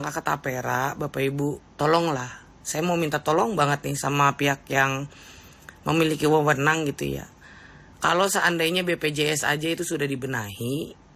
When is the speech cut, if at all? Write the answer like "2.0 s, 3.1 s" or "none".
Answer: none